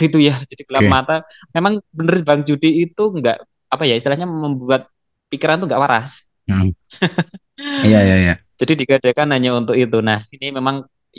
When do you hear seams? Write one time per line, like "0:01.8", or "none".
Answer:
none